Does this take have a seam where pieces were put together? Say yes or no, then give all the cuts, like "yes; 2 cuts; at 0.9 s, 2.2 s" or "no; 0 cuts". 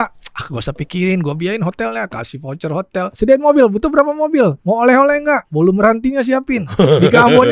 yes; 3 cuts; at 3.1 s, 4.6 s, 5.5 s